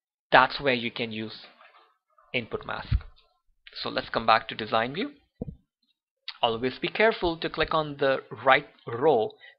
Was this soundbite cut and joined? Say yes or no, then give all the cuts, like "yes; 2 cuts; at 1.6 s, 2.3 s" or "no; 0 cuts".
yes; 1 cut; at 8.7 s